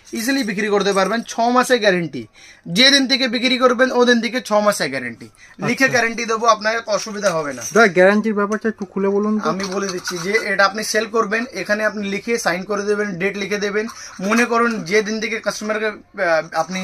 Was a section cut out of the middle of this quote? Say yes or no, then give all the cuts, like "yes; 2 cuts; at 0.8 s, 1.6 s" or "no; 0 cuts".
no; 0 cuts